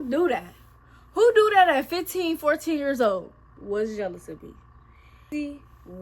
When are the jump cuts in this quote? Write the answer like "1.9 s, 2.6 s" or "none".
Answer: 3.5 s, 5.2 s